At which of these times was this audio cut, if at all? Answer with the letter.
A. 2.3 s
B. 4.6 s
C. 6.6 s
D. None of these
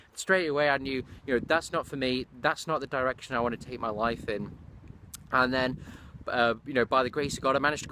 D